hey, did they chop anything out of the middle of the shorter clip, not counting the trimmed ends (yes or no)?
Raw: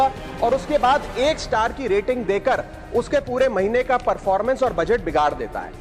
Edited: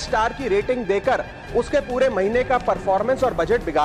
no